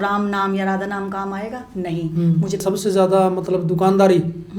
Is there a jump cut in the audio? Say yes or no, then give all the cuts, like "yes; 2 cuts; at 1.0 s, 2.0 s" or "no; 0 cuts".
yes; 1 cut; at 2.6 s